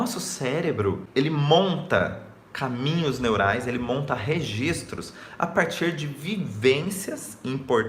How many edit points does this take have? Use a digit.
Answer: 1